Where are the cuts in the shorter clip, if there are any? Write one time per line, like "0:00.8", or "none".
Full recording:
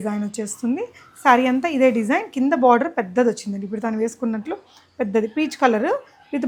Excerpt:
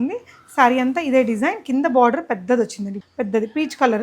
0:02.9